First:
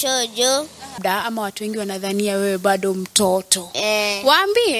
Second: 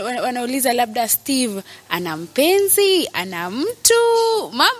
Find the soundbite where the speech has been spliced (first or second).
first